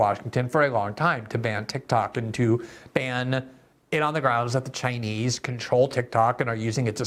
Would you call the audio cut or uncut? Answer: uncut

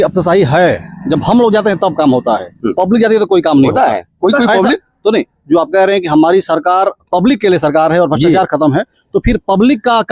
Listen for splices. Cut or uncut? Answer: uncut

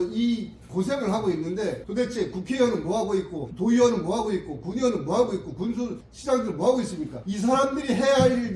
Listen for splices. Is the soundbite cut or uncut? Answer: uncut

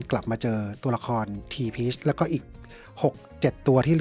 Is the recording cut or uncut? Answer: uncut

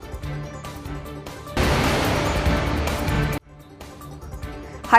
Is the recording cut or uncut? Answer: cut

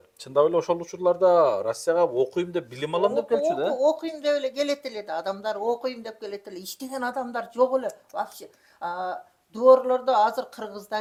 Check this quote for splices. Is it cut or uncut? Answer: uncut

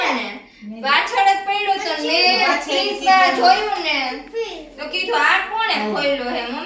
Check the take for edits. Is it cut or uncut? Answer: uncut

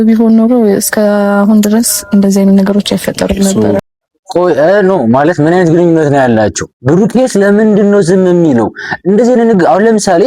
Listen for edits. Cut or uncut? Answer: uncut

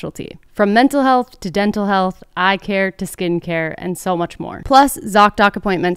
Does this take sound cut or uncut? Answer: cut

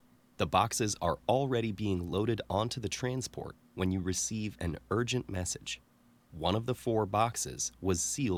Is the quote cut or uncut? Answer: uncut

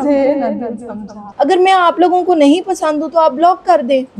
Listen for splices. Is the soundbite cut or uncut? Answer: cut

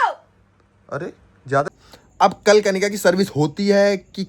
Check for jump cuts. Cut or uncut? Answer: cut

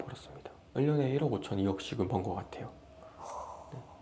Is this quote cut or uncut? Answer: uncut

